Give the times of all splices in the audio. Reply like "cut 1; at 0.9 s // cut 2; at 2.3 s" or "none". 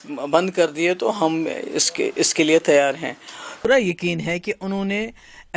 cut 1; at 3.6 s